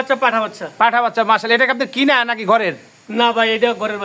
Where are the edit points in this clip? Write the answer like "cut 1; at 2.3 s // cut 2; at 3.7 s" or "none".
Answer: none